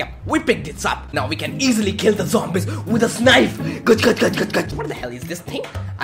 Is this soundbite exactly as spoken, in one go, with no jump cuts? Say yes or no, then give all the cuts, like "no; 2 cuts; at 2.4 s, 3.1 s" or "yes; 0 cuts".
no; 2 cuts; at 1.0 s, 4.7 s